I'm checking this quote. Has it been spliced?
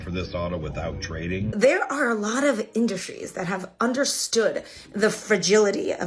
yes; 1 cut; at 1.5 s

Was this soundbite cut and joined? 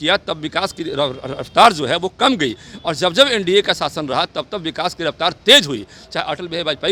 no; 0 cuts

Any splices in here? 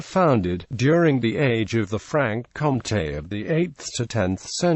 no; 0 cuts

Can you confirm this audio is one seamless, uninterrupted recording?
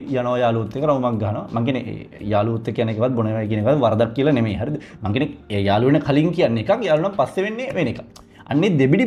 yes; 0 cuts

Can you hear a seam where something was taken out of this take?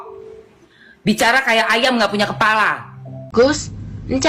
yes; 1 cut; at 3.2 s

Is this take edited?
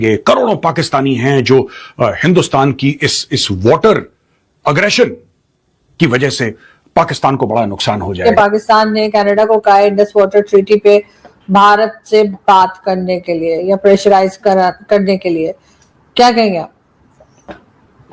yes; 1 cut; at 8.1 s

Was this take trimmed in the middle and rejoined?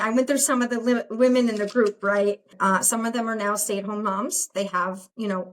yes; 1 cut; at 2.5 s

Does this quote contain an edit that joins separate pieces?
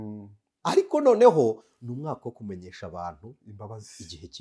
no; 0 cuts

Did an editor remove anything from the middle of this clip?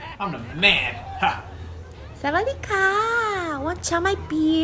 no; 0 cuts

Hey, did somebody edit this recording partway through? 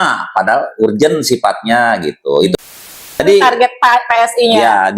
yes; 1 cut; at 2.6 s

